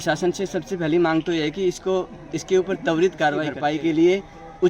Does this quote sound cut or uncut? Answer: cut